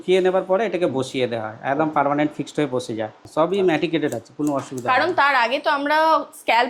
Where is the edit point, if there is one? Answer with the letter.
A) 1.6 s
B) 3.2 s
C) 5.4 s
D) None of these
B